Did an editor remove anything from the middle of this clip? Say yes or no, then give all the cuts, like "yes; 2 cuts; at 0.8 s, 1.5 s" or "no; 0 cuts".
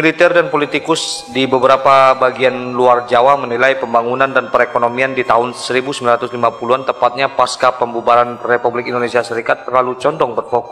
no; 0 cuts